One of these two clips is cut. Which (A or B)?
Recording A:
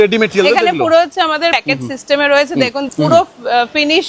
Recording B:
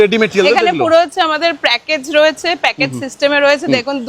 A